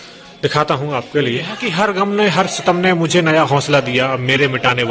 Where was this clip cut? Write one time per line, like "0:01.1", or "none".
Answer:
0:01.5

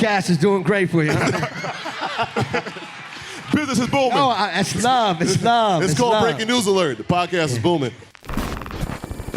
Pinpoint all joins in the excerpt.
0:08.1

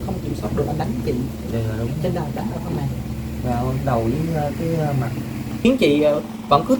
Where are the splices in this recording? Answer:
0:05.6

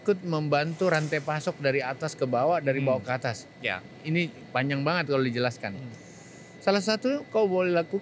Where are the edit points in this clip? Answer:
none

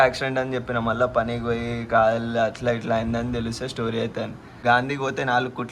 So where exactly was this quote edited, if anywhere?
0:04.5

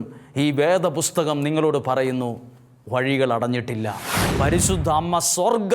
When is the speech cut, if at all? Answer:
0:04.2

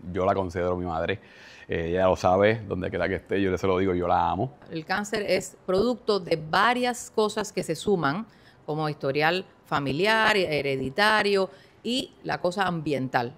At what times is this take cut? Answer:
0:04.6

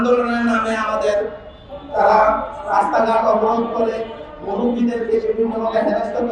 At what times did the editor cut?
none

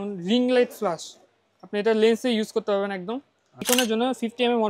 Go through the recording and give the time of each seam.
0:03.7

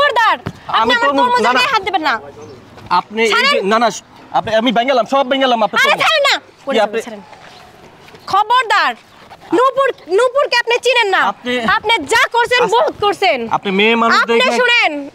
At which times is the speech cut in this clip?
none

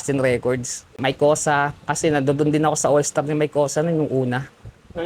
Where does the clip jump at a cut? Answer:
0:00.9

